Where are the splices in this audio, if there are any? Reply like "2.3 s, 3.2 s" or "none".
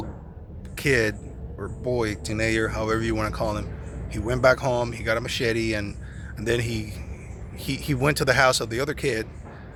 none